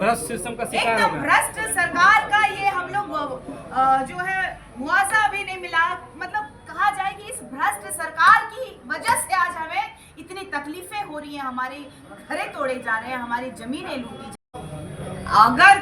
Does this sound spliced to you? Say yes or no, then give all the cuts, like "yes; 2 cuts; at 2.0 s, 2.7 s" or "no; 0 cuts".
yes; 1 cut; at 14.4 s